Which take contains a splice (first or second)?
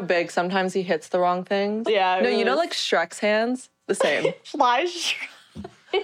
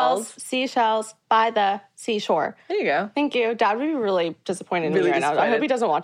first